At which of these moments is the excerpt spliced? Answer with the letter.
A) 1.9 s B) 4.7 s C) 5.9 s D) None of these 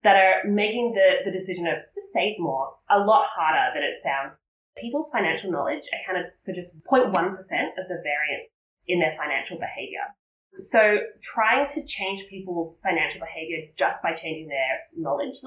B